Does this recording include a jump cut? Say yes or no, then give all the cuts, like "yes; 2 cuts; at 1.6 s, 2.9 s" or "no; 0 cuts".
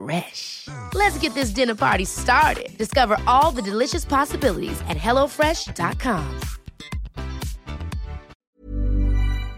yes; 1 cut; at 8.5 s